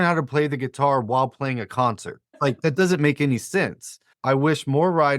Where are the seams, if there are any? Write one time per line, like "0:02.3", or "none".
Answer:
0:02.2
0:04.1